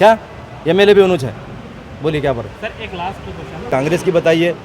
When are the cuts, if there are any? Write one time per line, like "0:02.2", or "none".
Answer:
0:03.7